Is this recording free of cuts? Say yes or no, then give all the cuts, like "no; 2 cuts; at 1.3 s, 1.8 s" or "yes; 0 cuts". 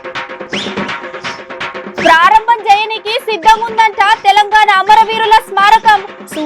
no; 1 cut; at 1.6 s